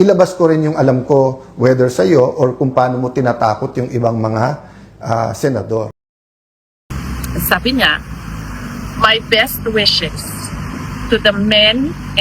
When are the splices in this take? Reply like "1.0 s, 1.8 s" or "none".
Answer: 6.3 s